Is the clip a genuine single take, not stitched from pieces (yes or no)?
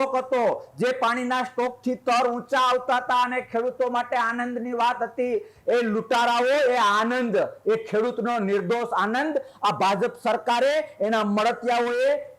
yes